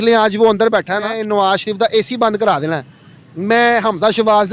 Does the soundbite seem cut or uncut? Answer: cut